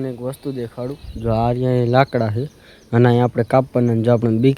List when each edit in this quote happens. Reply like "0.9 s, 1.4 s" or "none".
none